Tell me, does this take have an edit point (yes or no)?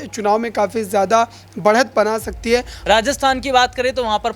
yes